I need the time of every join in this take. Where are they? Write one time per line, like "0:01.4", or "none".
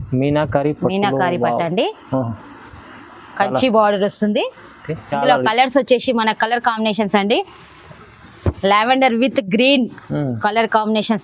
0:05.0